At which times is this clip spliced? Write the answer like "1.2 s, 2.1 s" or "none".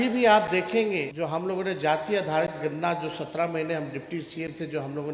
1.1 s

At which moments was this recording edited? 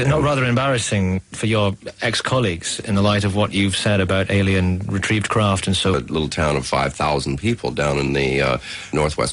none

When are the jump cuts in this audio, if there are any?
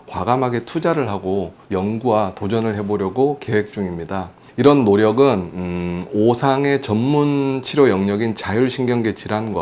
none

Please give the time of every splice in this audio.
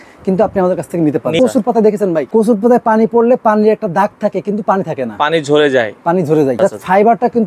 1.4 s, 2.3 s, 6.6 s

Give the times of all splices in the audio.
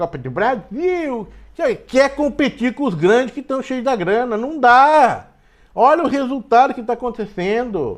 none

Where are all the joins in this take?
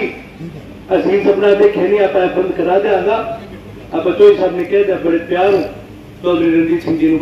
none

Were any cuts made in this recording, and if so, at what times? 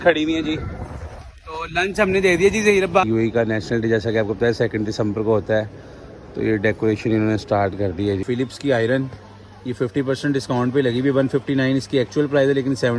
3.0 s, 8.2 s

